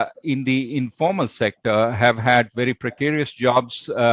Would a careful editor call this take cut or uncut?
uncut